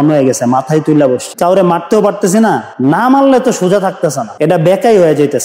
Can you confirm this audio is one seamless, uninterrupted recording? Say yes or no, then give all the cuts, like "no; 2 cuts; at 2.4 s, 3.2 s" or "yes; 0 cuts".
yes; 0 cuts